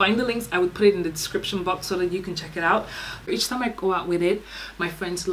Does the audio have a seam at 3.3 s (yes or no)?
yes